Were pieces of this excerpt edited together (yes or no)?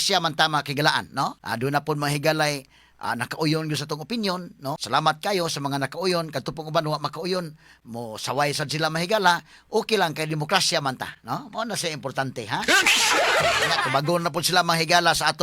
yes